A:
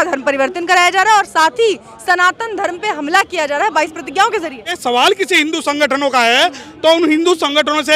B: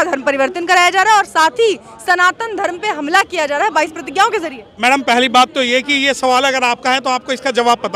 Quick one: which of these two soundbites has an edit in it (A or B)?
A